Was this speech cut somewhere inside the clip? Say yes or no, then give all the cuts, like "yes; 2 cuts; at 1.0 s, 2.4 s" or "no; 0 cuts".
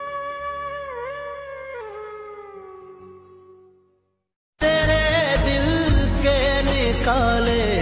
no; 0 cuts